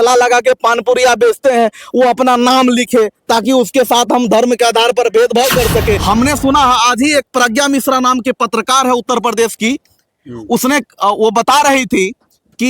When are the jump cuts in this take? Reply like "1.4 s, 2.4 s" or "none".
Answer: 6.0 s